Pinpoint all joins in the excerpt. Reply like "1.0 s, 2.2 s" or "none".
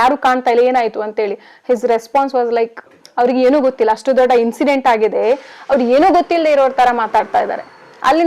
none